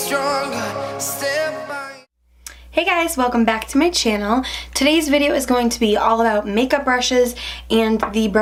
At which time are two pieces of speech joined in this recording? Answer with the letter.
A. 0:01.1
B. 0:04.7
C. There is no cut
C